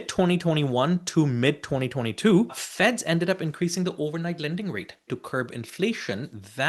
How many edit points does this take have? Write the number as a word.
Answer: two